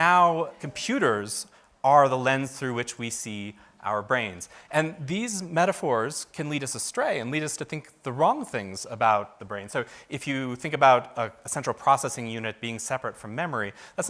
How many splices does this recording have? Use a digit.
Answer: 0